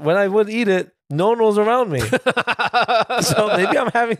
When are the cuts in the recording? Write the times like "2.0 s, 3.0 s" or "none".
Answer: 1.0 s